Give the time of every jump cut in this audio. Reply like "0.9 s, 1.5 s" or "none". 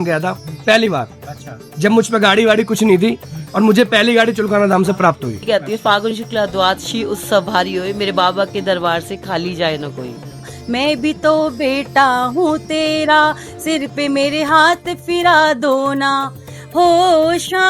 5.4 s, 10.5 s